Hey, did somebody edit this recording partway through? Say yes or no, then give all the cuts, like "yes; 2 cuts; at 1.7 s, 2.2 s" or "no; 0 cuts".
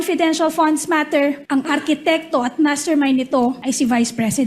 yes; 2 cuts; at 1.4 s, 3.6 s